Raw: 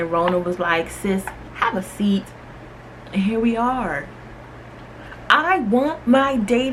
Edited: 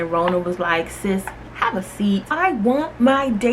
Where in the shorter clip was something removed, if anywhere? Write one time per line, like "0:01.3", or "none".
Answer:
0:02.3

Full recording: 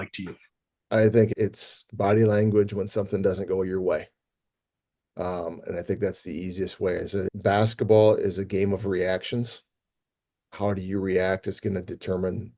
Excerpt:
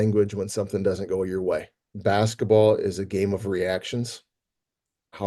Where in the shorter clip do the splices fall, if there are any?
0:01.9

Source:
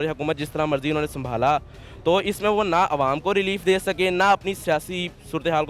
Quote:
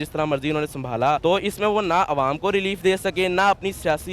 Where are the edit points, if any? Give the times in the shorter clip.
0:01.2

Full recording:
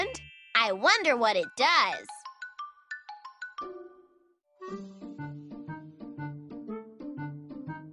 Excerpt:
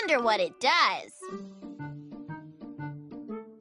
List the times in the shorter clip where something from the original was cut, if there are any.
0:01.1

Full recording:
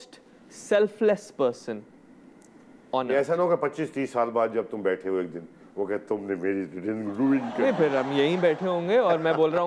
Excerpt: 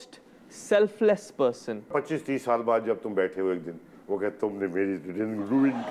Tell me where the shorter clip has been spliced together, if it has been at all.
0:01.9

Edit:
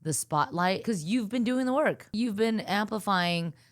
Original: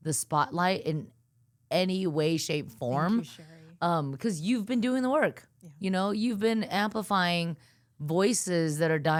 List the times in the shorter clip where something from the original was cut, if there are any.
0:00.8
0:02.1

